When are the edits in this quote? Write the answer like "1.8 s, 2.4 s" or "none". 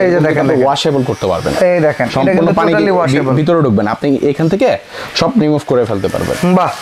none